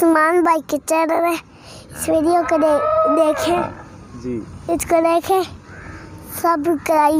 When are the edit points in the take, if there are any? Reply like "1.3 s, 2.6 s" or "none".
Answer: none